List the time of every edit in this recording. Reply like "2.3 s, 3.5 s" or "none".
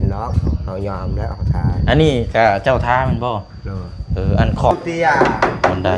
4.7 s